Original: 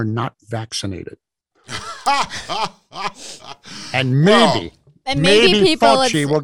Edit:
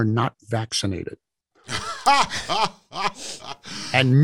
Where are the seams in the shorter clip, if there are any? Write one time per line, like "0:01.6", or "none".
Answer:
none